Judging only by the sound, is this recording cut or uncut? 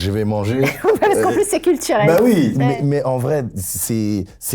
uncut